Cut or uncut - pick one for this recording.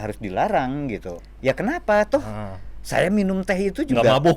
cut